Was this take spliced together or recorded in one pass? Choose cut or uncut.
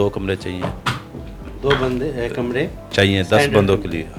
uncut